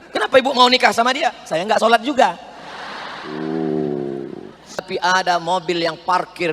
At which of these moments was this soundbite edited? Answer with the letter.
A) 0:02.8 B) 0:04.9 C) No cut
B